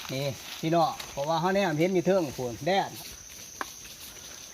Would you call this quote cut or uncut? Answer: cut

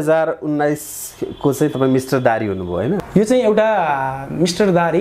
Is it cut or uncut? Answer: cut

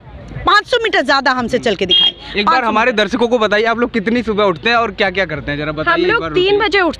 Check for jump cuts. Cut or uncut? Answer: uncut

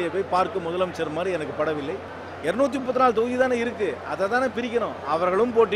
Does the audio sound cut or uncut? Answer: cut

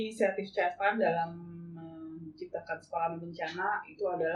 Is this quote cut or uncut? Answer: uncut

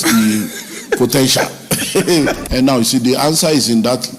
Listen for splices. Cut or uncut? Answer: uncut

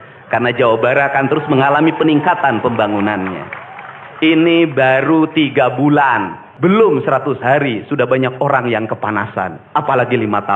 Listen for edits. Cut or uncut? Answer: cut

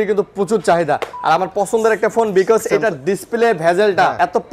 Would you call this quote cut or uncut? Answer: uncut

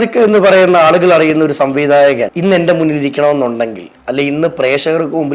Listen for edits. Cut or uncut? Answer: cut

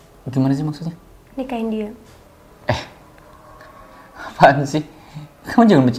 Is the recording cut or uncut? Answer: uncut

